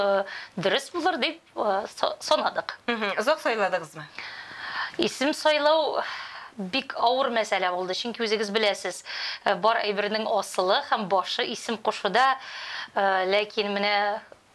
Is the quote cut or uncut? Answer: uncut